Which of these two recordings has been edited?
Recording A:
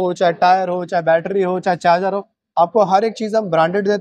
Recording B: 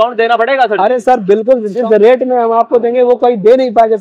B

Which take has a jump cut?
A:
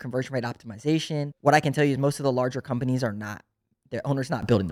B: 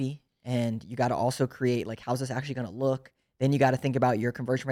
A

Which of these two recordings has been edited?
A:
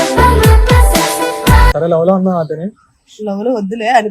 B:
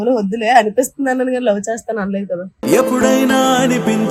A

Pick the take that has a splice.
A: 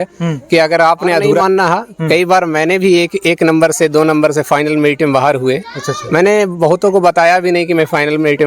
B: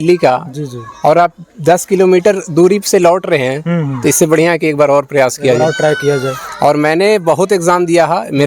A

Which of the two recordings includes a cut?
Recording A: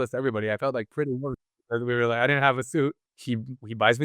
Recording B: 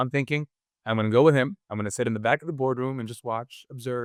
A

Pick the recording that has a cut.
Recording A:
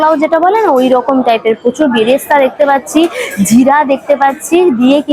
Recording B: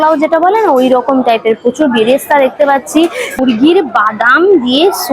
B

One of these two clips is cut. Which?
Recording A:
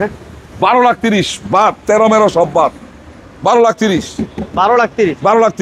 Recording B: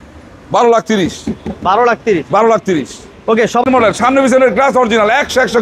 B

